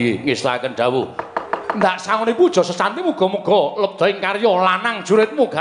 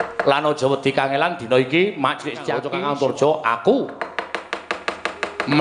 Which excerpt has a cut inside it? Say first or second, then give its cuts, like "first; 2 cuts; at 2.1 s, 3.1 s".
second; 1 cut; at 2.6 s